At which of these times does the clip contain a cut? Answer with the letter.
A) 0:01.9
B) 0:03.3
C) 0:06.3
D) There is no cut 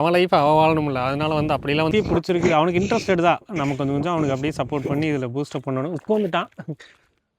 A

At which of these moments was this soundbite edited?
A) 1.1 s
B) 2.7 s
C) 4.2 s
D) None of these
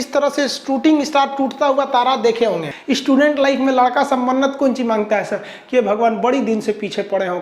B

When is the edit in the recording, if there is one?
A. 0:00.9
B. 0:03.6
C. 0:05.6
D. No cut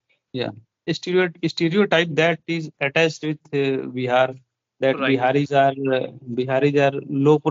A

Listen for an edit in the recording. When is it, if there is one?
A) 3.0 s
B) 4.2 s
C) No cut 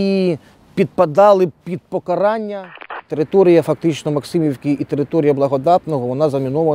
A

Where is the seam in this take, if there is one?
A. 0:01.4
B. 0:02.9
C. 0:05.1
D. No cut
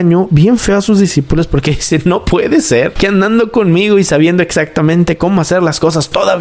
B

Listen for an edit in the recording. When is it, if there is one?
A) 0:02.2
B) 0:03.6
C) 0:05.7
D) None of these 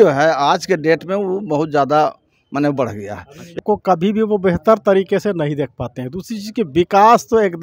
B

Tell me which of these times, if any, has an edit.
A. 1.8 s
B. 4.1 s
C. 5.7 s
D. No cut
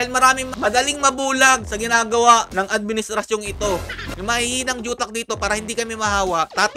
B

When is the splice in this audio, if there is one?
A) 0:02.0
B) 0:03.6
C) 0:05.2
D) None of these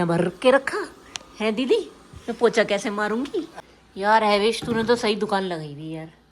B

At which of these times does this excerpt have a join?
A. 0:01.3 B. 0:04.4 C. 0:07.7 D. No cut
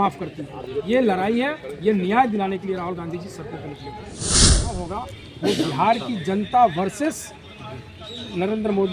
B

